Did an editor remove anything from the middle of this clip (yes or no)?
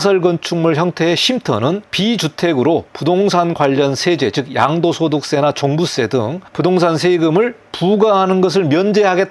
yes